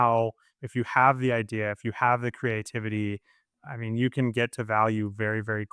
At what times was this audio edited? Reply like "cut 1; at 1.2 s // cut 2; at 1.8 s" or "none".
none